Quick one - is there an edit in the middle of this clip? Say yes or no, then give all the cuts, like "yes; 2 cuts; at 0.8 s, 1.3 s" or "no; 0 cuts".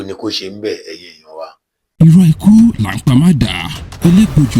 yes; 1 cut; at 2.0 s